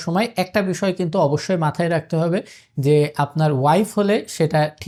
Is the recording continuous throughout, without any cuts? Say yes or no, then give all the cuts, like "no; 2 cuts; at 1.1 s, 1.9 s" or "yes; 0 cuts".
yes; 0 cuts